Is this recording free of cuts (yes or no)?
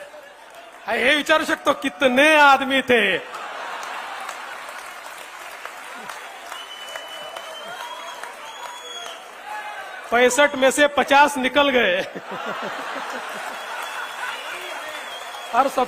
yes